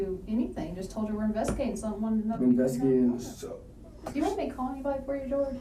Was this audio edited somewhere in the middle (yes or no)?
no